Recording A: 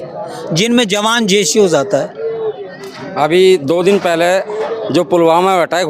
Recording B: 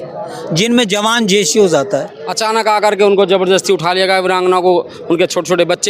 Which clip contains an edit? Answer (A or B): B